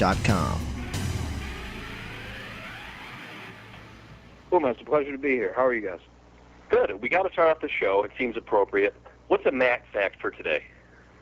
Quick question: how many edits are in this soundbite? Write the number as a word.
one